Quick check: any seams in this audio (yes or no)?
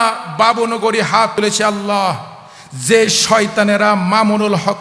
yes